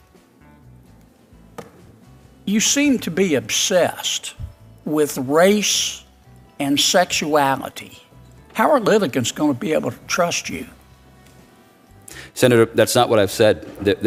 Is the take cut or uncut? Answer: uncut